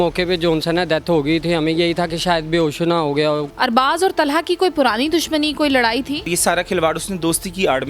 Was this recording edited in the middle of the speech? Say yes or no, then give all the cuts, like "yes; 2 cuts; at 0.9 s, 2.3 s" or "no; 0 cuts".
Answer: yes; 2 cuts; at 3.5 s, 6.3 s